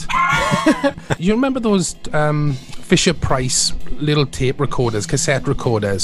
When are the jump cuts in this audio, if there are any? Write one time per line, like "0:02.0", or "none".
0:01.1